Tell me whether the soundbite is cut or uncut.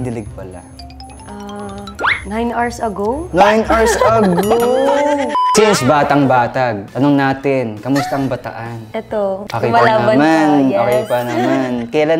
cut